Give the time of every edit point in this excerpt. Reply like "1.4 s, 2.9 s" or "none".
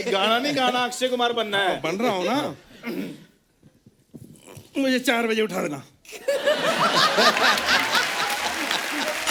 none